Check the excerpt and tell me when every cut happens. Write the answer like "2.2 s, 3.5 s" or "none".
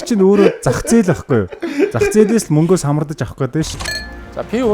3.7 s